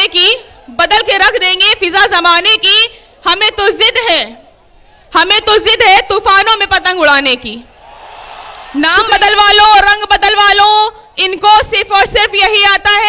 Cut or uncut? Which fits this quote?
cut